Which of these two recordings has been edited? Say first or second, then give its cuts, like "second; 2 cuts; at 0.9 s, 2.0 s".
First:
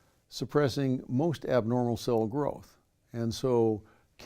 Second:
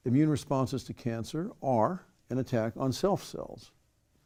first; 1 cut; at 1.6 s